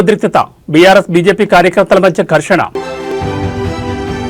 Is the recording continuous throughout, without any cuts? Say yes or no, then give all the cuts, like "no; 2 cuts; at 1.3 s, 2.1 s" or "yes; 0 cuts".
no; 1 cut; at 2.9 s